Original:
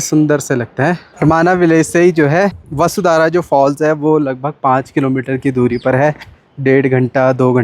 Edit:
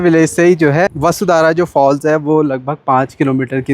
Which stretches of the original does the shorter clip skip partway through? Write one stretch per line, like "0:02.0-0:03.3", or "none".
0:02.5-0:02.7